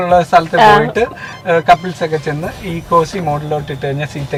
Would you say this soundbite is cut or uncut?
uncut